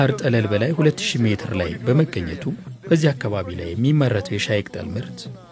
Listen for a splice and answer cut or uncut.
uncut